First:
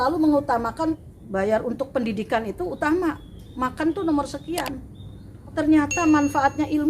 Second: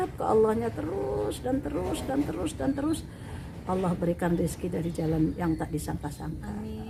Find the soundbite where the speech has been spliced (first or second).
first